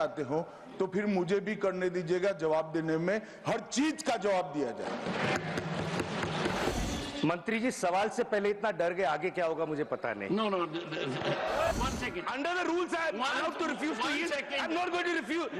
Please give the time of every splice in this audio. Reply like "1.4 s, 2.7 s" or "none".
6.7 s, 11.7 s

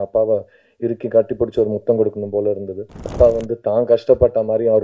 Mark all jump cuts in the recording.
3.1 s

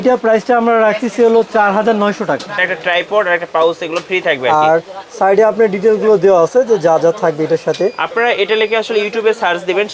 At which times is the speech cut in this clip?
2.6 s

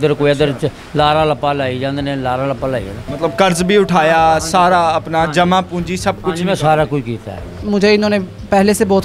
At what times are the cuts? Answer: 3.0 s, 7.6 s

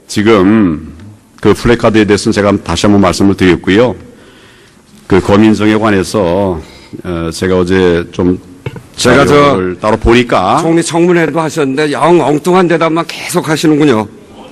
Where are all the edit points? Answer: 3.3 s

